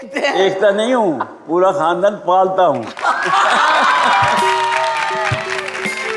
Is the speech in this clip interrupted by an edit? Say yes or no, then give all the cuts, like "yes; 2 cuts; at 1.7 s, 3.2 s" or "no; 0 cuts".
no; 0 cuts